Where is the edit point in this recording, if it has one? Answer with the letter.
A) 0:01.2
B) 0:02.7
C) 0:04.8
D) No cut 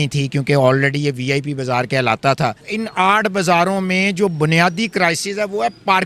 B